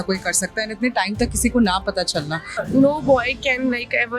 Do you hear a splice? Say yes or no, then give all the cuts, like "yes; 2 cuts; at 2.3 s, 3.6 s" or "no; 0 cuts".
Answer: yes; 1 cut; at 2.6 s